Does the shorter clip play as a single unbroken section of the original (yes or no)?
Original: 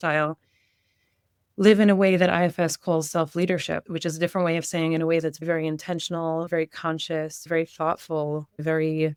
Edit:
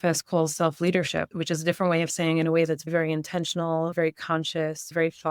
yes